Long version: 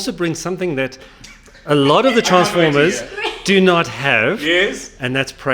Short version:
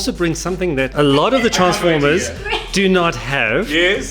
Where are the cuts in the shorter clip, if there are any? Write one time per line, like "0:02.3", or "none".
0:00.9